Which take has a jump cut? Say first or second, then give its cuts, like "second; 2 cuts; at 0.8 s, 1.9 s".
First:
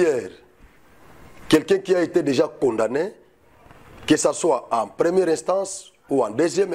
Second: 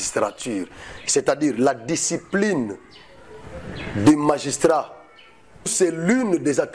second; 1 cut; at 5.7 s